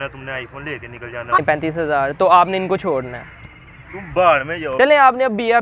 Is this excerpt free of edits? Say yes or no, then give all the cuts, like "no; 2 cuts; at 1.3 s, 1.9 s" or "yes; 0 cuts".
no; 2 cuts; at 1.4 s, 4.6 s